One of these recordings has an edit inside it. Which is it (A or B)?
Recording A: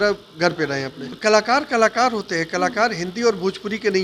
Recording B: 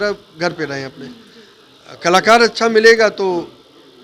A